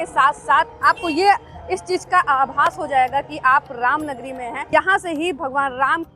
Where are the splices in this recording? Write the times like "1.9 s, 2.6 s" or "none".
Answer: 4.6 s